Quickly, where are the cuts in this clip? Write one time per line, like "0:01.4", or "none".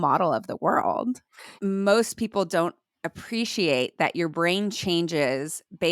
0:01.5